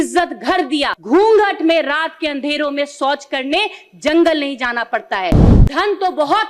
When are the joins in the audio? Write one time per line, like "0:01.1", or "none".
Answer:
0:00.9
0:05.5